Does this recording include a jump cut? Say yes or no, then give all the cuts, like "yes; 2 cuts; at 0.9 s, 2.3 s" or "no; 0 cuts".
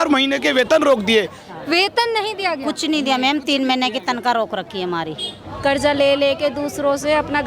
yes; 2 cuts; at 1.4 s, 5.4 s